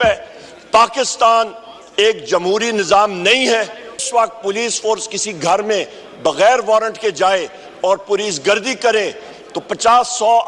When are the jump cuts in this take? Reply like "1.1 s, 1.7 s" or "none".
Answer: 4.1 s